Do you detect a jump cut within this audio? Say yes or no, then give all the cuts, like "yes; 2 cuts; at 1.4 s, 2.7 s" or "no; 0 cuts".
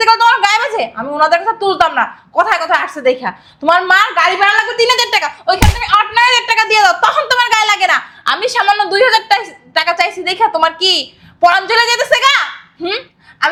no; 0 cuts